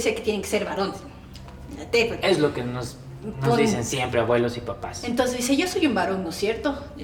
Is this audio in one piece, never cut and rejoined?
yes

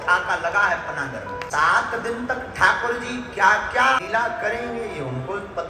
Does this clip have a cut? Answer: yes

